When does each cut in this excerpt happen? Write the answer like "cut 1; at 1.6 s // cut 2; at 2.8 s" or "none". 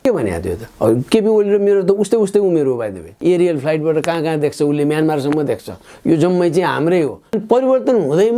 cut 1; at 3.1 s // cut 2; at 7.4 s